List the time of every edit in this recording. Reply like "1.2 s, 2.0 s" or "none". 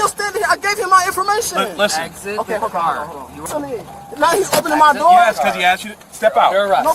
3.4 s